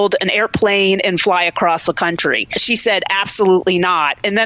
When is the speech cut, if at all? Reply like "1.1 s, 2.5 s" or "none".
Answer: 2.6 s